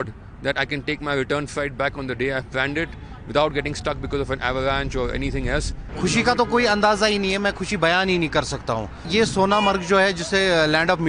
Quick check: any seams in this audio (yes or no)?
yes